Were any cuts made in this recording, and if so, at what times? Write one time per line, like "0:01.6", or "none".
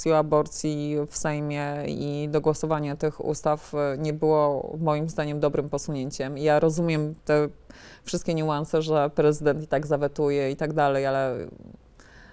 none